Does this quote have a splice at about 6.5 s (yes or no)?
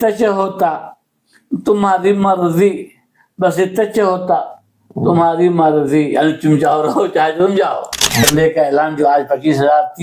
no